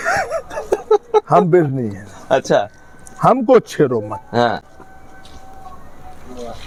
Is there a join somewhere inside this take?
no; 0 cuts

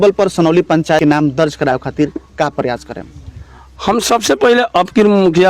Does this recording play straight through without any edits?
no; 1 cut; at 1.0 s

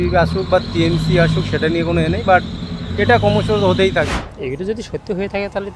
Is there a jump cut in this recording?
yes; 1 cut; at 4.1 s

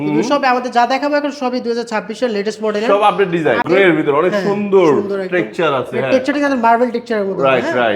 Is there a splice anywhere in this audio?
yes; 1 cut; at 3.6 s

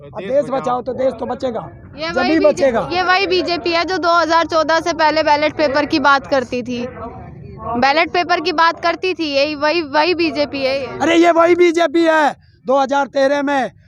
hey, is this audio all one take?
yes; 0 cuts

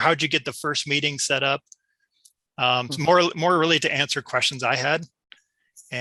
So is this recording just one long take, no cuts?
yes; 0 cuts

